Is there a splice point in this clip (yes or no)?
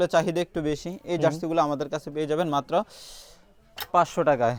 no